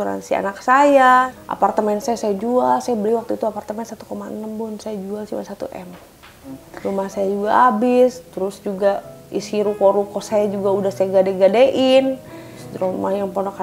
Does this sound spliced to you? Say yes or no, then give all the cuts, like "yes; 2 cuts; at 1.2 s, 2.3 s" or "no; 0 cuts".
yes; 3 cuts; at 1.3 s, 6.7 s, 12.6 s